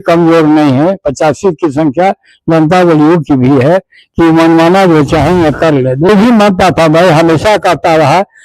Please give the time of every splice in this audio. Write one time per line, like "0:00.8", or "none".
0:06.1